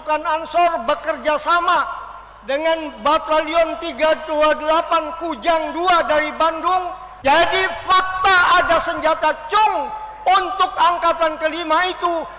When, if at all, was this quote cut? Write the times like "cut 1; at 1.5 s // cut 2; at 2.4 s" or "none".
cut 1; at 7.0 s